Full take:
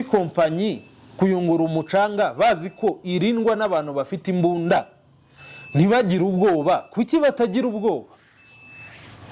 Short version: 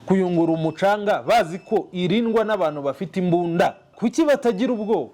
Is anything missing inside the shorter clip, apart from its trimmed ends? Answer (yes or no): yes